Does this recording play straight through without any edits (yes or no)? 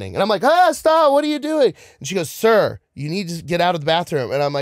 yes